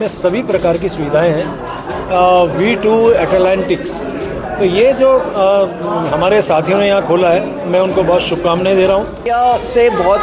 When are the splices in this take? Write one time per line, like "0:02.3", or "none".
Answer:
0:09.2